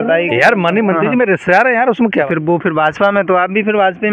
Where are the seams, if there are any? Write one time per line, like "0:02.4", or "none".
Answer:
0:02.2